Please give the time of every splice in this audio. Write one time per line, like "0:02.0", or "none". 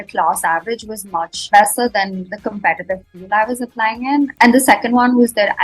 0:04.3